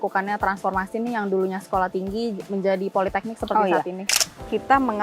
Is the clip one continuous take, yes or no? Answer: no